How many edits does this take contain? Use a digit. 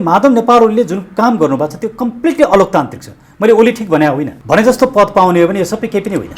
1